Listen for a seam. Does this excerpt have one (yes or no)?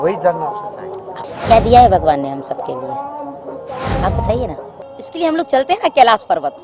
yes